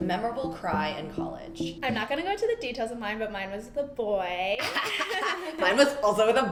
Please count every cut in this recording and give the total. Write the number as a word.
zero